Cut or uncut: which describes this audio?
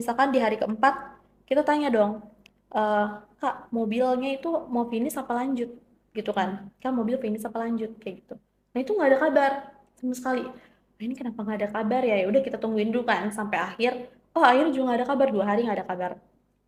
uncut